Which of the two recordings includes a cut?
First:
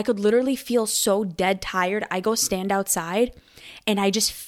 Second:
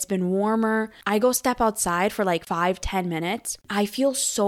second; 3 cuts; at 1.0 s, 2.4 s, 3.5 s

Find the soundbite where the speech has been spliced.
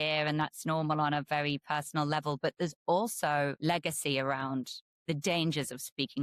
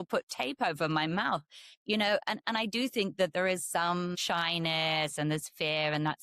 second; 1 cut; at 4.2 s

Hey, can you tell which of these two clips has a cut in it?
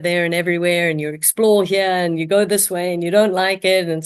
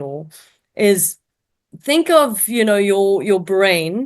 second; 1 cut; at 1.7 s

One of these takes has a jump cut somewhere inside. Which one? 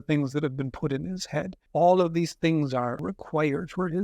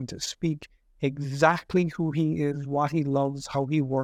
first; 2 cuts; at 1.6 s, 3.0 s

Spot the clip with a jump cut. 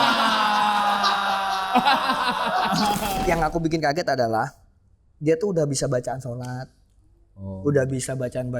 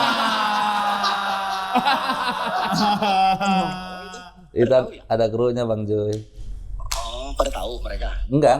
first; 1 cut; at 3.0 s

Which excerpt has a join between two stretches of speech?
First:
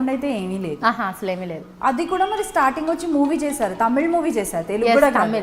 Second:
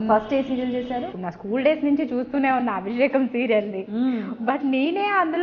second; 1 cut; at 1.1 s

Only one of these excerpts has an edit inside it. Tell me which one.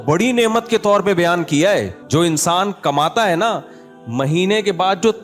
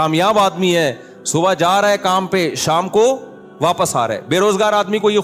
first; 1 cut; at 2.0 s

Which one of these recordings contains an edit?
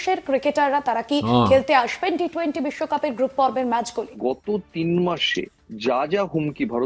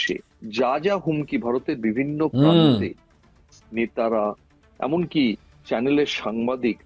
first; 1 cut; at 4.0 s

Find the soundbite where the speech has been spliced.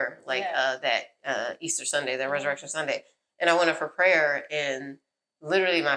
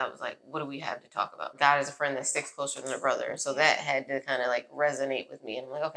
second; 1 cut; at 1.5 s

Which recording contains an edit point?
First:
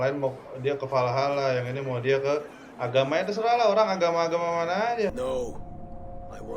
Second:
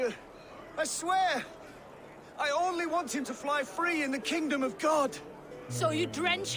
first; 1 cut; at 5.1 s

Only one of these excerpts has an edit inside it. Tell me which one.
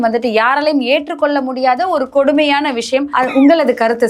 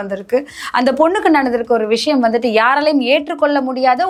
first; 1 cut; at 3.1 s

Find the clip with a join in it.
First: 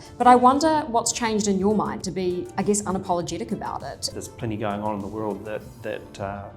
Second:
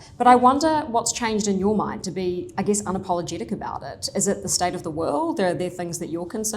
first; 1 cut; at 4.1 s

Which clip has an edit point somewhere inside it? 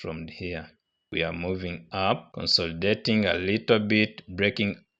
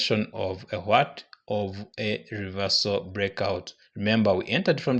first; 1 cut; at 1.1 s

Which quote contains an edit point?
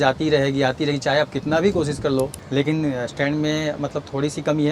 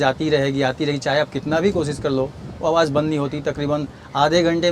first; 1 cut; at 2.4 s

